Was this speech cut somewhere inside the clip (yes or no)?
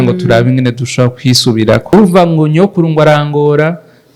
yes